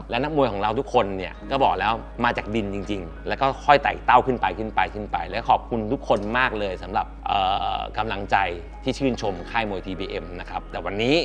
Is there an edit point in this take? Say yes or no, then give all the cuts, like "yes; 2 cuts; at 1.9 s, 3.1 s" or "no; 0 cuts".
no; 0 cuts